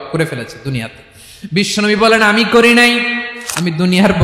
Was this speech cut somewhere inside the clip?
yes; 1 cut; at 3.3 s

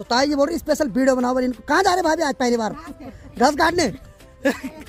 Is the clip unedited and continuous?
yes; 0 cuts

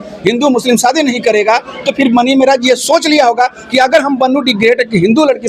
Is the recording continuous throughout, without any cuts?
yes; 0 cuts

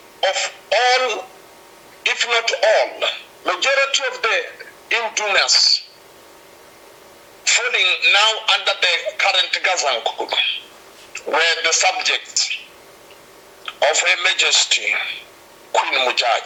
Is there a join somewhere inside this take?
no; 0 cuts

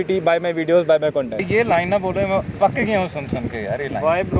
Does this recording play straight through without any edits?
no; 1 cut; at 1.4 s

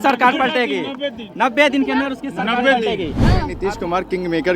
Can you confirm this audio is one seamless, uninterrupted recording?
no; 1 cut; at 3.5 s

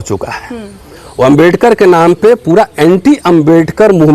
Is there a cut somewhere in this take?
no; 0 cuts

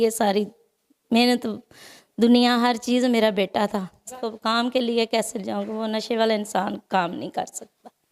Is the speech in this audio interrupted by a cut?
yes; 1 cut; at 4.2 s

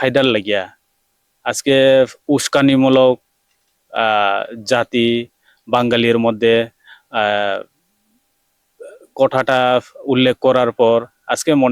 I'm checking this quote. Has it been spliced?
no; 0 cuts

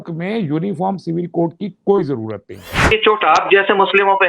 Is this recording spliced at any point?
yes; 1 cut; at 2.9 s

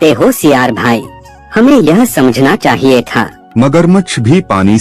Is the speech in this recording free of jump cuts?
yes; 0 cuts

